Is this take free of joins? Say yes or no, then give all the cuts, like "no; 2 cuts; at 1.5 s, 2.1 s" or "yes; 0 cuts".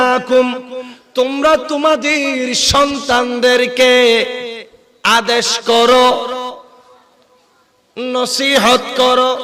yes; 0 cuts